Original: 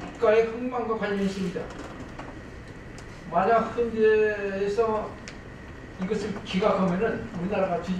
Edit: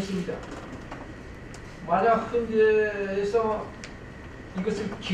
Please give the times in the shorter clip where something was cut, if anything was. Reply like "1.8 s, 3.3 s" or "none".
1.4 s